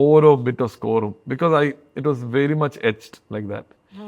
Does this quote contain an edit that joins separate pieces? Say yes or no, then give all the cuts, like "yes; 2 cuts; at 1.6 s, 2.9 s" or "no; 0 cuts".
no; 0 cuts